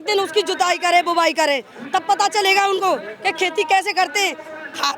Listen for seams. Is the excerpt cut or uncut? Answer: uncut